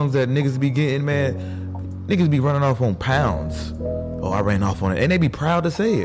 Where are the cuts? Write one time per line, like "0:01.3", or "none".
none